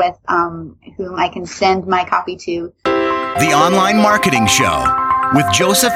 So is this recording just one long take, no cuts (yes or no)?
no